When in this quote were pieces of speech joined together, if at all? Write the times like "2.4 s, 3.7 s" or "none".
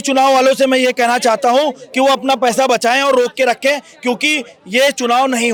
none